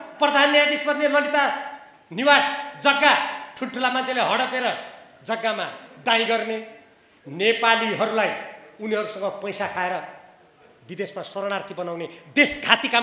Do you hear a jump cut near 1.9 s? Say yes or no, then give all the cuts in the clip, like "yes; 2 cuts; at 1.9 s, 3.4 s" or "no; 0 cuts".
no; 0 cuts